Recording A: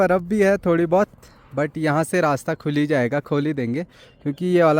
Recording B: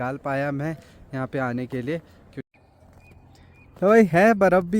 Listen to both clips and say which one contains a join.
B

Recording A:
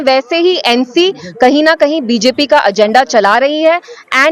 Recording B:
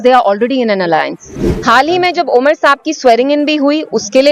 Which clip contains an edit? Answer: B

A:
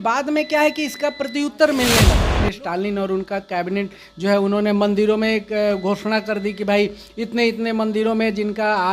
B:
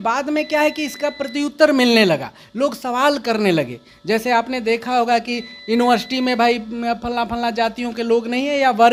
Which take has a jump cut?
A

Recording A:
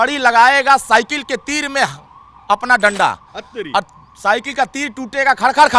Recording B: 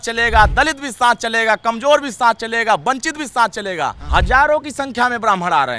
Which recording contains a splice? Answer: B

